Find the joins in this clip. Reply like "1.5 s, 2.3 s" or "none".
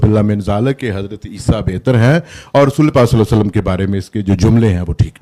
none

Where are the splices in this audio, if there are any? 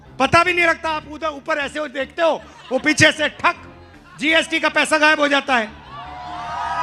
none

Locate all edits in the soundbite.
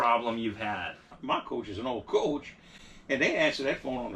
1.2 s

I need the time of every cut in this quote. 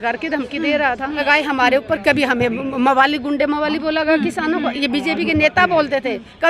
1.2 s

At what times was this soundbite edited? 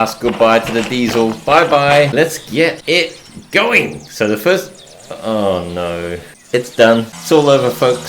2.4 s, 6.3 s, 7.1 s

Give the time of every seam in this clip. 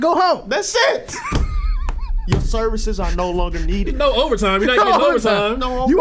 none

